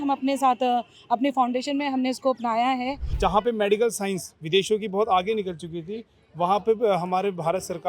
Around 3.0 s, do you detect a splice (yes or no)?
yes